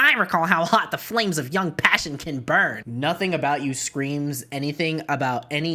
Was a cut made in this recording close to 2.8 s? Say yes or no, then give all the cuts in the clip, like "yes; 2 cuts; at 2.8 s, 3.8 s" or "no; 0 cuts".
yes; 1 cut; at 2.8 s